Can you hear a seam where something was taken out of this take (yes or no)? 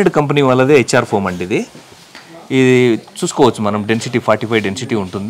no